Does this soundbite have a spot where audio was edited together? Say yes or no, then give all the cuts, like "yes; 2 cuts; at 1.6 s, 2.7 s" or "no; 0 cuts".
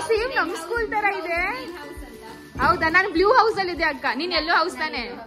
no; 0 cuts